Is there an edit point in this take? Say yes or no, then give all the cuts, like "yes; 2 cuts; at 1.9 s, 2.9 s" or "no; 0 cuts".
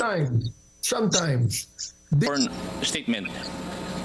yes; 1 cut; at 2.3 s